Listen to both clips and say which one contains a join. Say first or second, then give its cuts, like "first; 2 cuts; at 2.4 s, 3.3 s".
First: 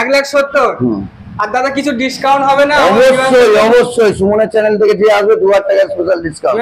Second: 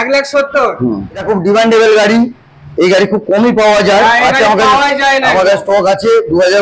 second; 1 cut; at 1.2 s